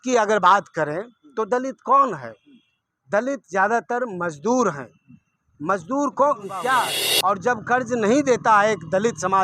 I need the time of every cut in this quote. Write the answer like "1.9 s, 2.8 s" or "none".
7.0 s